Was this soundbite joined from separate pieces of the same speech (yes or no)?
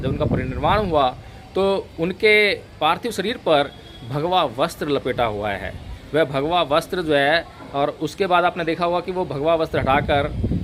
no